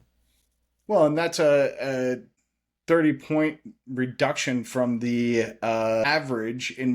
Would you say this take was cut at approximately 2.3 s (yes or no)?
yes